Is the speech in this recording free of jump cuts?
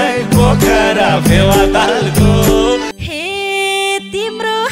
no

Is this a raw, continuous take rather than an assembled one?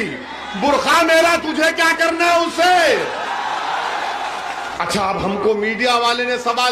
no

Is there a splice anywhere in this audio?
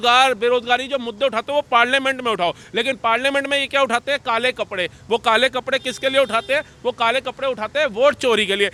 no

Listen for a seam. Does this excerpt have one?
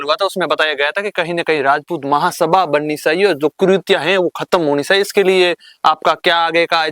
no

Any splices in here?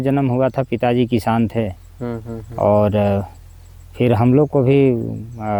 no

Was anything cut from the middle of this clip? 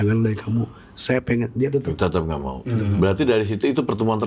no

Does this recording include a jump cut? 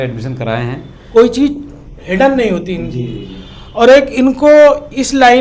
yes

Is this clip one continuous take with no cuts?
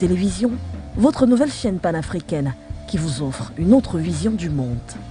yes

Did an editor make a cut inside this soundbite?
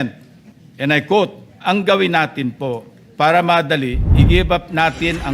yes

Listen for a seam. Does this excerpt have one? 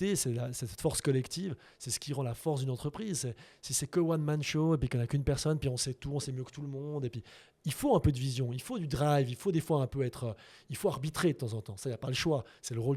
no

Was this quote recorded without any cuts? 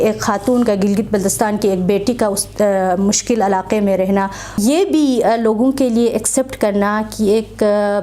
no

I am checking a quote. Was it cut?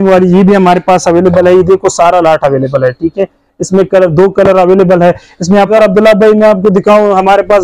yes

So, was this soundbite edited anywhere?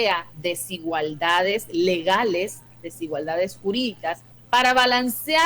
yes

